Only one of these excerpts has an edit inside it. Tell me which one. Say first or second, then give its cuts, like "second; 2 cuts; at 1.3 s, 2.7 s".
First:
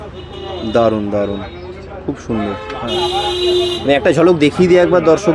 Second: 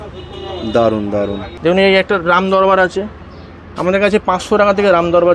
second; 1 cut; at 1.5 s